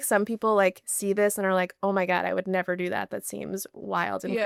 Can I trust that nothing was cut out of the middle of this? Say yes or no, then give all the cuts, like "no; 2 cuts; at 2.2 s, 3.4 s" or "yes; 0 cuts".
yes; 0 cuts